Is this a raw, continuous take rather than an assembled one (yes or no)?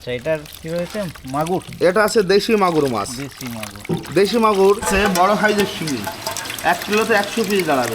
no